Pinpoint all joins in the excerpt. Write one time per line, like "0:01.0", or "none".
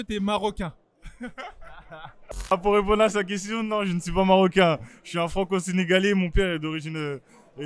0:02.5